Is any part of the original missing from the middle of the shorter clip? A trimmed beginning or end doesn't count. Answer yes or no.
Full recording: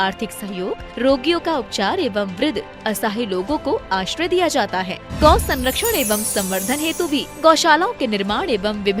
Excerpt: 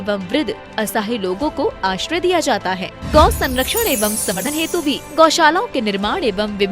yes